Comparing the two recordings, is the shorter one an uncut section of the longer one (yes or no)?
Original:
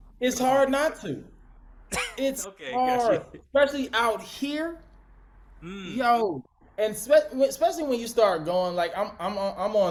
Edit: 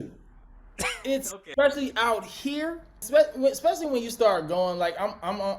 no